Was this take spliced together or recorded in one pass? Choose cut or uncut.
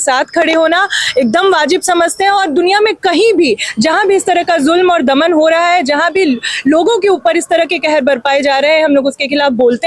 uncut